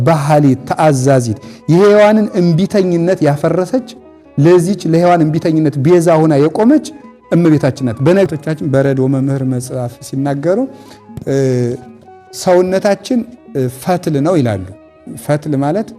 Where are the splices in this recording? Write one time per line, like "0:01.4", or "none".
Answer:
0:08.3